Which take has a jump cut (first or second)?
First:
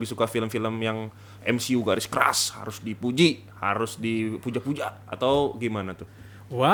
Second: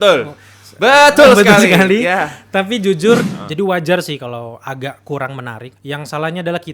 second